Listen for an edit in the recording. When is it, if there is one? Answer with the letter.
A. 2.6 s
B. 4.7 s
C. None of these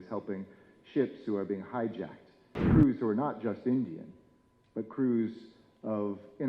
A